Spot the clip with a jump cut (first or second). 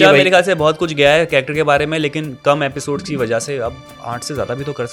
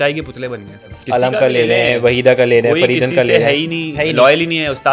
second